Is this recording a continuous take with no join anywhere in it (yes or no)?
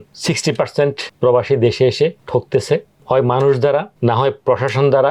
yes